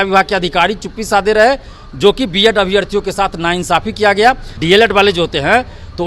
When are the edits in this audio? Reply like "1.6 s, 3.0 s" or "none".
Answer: 4.5 s